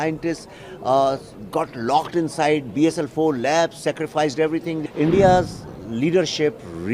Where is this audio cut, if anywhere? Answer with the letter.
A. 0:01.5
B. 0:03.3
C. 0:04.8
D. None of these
C